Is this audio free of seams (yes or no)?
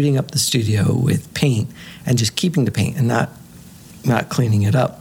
yes